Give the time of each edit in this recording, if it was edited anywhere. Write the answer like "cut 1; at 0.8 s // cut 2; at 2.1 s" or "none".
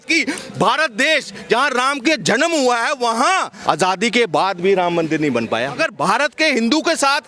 cut 1; at 3.5 s // cut 2; at 5.8 s